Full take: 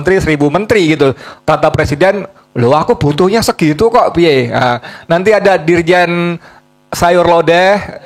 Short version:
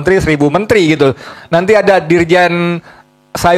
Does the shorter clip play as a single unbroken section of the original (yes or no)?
no